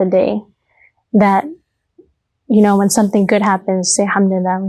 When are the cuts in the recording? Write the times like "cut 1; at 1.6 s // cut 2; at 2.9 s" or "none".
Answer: none